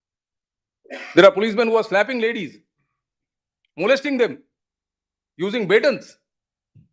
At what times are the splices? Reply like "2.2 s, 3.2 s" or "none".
none